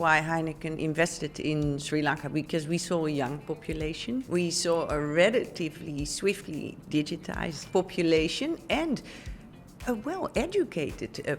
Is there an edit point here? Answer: yes; 2 cuts; at 4.3 s, 7.6 s

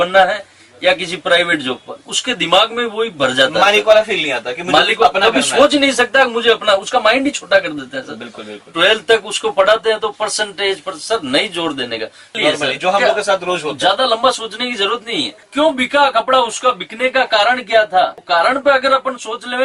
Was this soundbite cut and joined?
yes; 1 cut; at 12.4 s

